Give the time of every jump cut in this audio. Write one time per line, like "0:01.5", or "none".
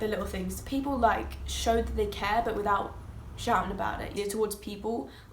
0:04.1